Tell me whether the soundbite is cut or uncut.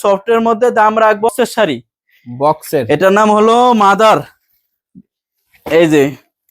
cut